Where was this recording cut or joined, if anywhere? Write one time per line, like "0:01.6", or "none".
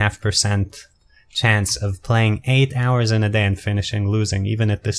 none